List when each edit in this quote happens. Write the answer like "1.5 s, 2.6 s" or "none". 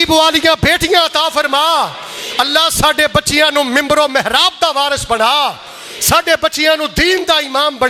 none